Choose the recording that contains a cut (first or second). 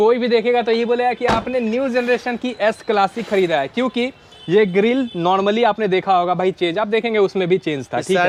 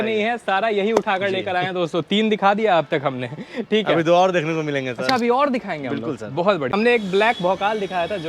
second